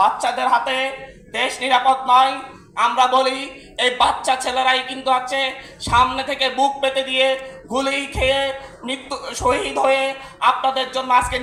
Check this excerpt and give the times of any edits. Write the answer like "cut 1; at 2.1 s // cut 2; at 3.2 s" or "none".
none